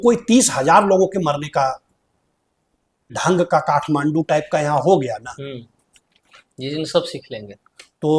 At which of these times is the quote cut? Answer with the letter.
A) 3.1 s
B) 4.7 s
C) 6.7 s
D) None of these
A